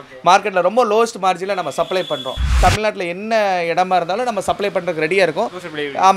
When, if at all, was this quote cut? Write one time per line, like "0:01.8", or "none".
0:02.5